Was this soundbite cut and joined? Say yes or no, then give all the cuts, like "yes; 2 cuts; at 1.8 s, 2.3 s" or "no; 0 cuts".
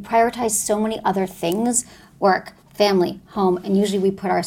no; 0 cuts